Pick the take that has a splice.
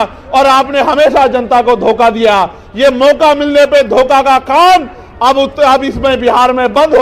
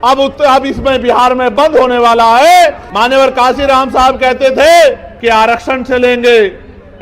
second; 2 cuts; at 2.9 s, 5.1 s

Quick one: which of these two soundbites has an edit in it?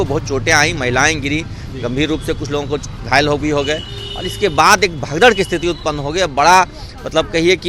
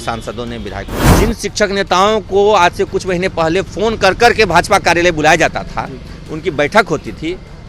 second; 1 cut; at 1.1 s

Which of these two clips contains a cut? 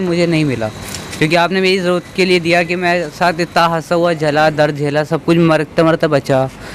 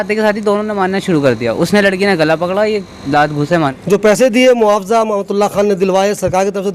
second; 1 cut; at 3.8 s

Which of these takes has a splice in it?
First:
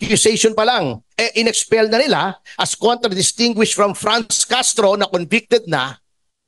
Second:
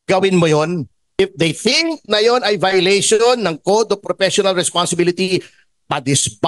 second; 1 cut; at 1.2 s

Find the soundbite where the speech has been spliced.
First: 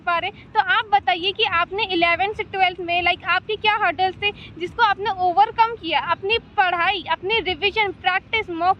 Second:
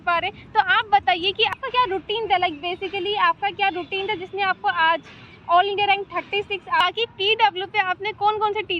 second; 2 cuts; at 1.6 s, 6.8 s

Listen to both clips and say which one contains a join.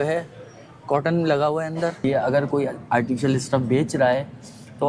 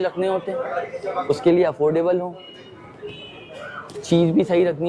first; 1 cut; at 2.0 s

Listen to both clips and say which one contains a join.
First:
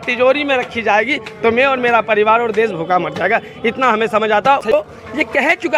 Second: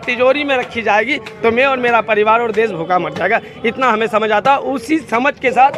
first; 1 cut; at 4.7 s

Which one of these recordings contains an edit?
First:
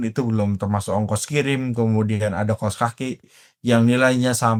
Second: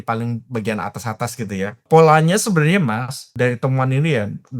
second; 2 cuts; at 1.8 s, 3.3 s

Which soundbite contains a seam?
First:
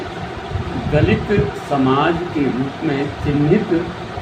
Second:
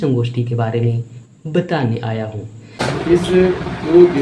second; 1 cut; at 2.8 s

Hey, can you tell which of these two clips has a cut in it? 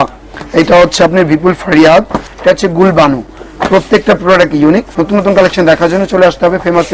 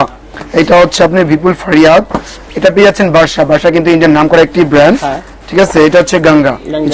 first; 2 cuts; at 2.2 s, 4.9 s

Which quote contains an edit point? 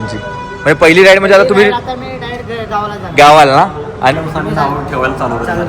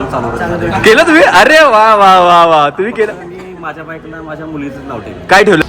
first; 1 cut; at 4.1 s

